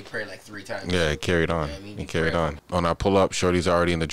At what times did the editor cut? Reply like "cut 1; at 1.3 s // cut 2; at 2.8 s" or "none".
cut 1; at 2.6 s